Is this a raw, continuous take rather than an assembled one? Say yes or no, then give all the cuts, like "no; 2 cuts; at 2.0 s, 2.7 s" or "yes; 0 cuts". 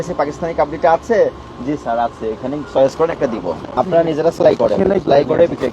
no; 1 cut; at 3.8 s